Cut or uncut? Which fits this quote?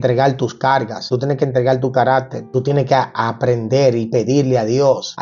cut